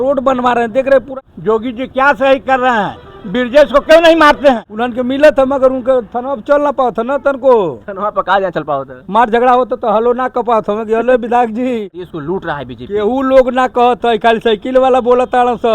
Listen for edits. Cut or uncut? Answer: cut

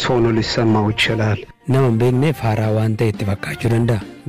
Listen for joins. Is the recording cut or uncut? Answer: cut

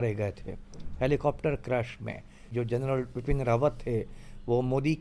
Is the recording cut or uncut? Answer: cut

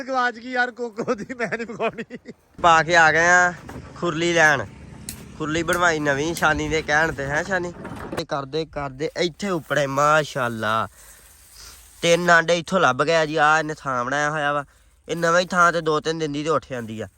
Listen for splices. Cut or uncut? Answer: cut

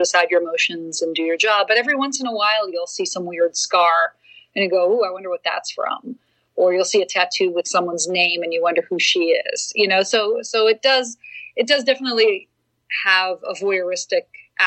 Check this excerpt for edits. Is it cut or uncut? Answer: uncut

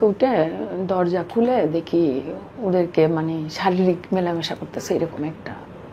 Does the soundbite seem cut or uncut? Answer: uncut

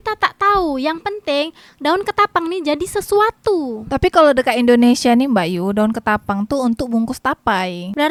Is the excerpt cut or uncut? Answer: uncut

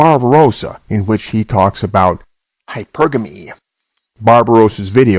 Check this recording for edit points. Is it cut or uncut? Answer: cut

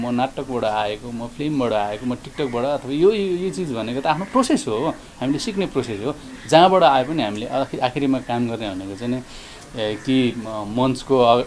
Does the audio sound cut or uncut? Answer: uncut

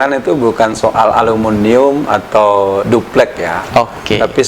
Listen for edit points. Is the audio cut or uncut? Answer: uncut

